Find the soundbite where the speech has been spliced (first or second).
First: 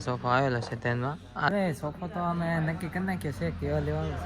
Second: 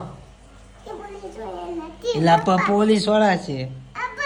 first